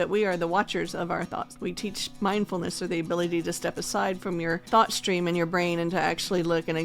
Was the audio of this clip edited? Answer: yes; 2 cuts; at 1.6 s, 4.6 s

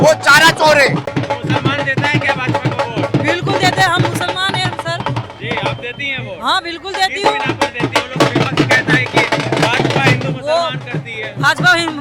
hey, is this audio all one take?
no; 1 cut; at 1.1 s

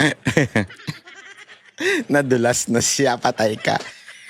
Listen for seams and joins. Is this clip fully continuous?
yes; 0 cuts

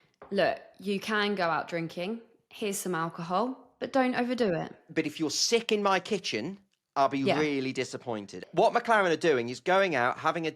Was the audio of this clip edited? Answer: yes; 1 cut; at 8.3 s

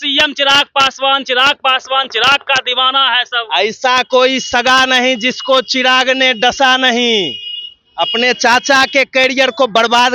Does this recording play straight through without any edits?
yes; 0 cuts

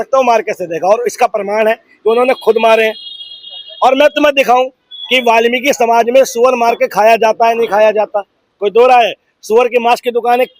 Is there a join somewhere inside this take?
no; 0 cuts

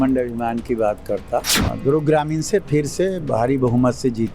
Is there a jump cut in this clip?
yes; 1 cut; at 1.6 s

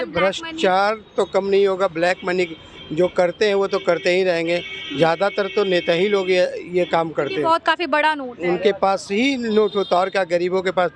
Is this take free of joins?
yes; 0 cuts

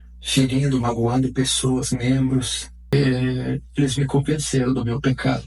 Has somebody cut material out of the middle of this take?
yes; 1 cut; at 2.9 s

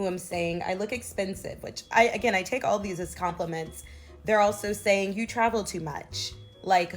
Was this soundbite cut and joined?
yes; 1 cut; at 5.0 s

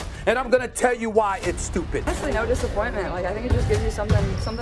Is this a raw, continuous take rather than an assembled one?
no; 1 cut; at 2.1 s

